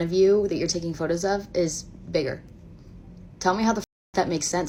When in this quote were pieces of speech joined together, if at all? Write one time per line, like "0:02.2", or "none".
none